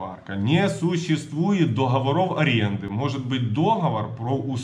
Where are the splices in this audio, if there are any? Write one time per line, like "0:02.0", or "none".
none